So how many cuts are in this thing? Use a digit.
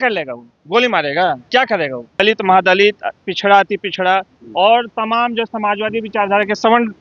1